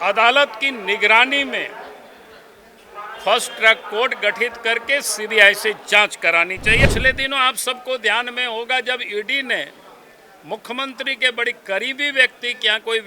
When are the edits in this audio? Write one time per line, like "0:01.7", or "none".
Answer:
0:06.8